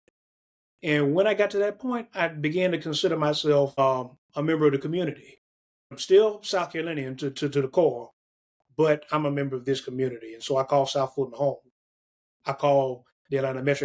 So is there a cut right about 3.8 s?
yes; 2 cuts; at 3.8 s, 6.0 s

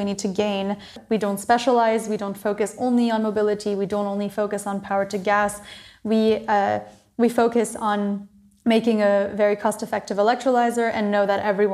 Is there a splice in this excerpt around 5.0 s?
no; 1 cut; at 1.0 s

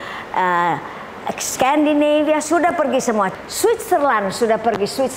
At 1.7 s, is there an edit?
no; 1 cut; at 3.4 s

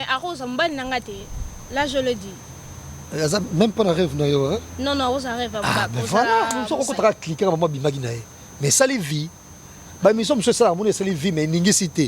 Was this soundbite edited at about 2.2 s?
no; 1 cut; at 6.7 s

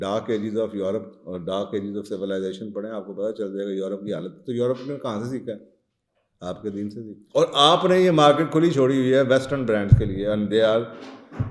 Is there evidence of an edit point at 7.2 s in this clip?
yes; 1 cut; at 7.2 s

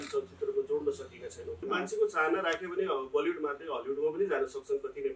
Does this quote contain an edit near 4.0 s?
no; 1 cut; at 1.6 s

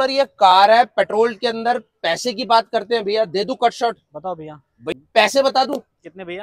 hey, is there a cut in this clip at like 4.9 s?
yes; 1 cut; at 4.9 s

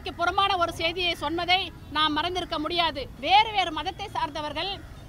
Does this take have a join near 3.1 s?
yes; 1 cut; at 3.1 s

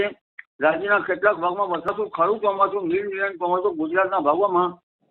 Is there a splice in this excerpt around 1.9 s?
yes; 1 cut; at 1.9 s

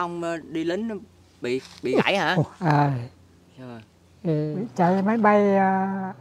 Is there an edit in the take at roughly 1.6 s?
no; 1 cut; at 4.6 s

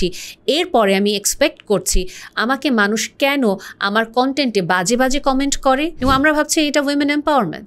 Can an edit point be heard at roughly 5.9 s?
yes; 1 cut; at 5.9 s

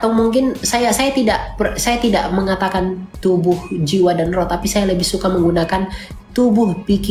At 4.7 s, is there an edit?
no; 0 cuts

